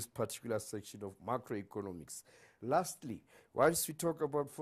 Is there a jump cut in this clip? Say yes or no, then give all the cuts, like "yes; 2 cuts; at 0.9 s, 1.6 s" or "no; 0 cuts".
no; 0 cuts